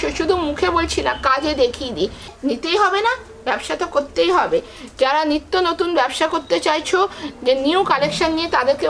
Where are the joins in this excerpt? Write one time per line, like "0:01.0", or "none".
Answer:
0:02.3